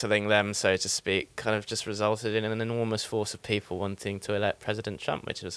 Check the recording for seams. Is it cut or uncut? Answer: uncut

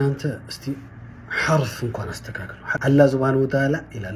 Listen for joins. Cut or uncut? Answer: cut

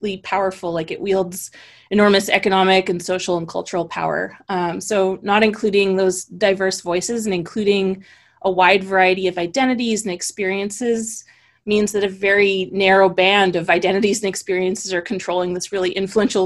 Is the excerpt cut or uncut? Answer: uncut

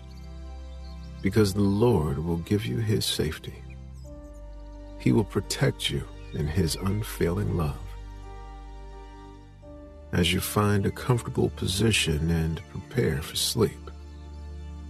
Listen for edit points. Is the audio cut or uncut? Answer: uncut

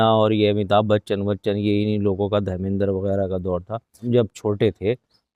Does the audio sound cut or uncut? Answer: cut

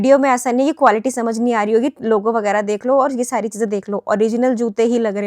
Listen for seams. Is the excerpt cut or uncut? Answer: uncut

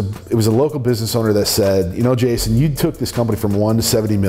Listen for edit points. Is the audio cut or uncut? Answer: uncut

